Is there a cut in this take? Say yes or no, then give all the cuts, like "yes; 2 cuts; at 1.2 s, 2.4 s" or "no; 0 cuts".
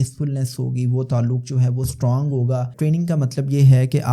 yes; 1 cut; at 2.7 s